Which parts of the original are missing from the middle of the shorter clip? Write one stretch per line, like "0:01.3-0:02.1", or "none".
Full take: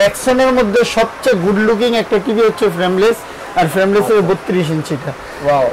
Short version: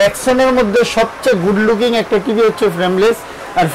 none